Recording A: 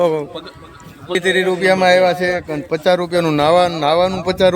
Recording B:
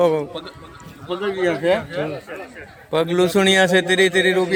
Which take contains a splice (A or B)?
A